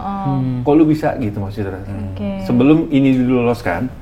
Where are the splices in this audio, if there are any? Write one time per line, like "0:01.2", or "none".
none